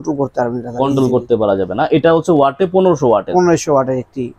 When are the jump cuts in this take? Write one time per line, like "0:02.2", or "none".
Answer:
none